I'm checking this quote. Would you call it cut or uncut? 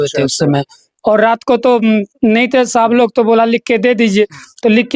uncut